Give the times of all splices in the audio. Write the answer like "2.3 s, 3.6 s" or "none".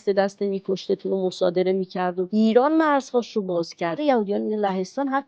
2.3 s, 4.0 s